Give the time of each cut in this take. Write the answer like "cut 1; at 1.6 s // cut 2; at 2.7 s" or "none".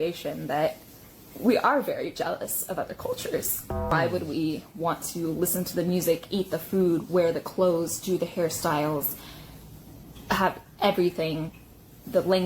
cut 1; at 3.9 s

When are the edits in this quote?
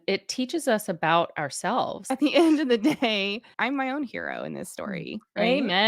cut 1; at 2.0 s // cut 2; at 3.5 s

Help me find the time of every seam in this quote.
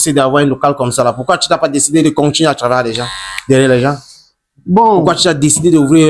none

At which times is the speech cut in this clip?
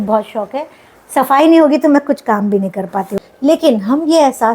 cut 1; at 3.1 s

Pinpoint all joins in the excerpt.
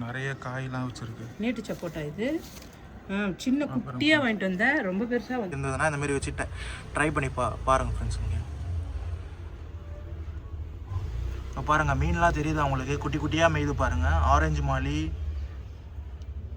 cut 1; at 5.6 s

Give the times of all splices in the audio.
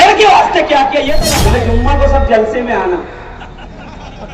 cut 1; at 1.2 s

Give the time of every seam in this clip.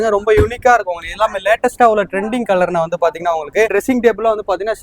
cut 1; at 3.7 s

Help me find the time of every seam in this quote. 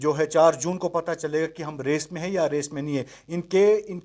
none

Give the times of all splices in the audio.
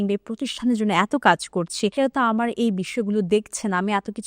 cut 1; at 1.9 s

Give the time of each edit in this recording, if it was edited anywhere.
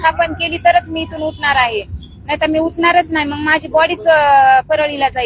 none

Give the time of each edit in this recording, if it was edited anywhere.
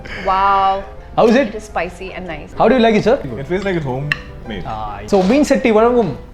cut 1; at 1.0 s // cut 2; at 2.4 s // cut 3; at 3.3 s // cut 4; at 5.0 s

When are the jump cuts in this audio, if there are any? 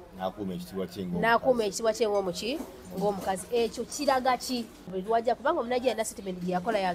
cut 1; at 5.0 s

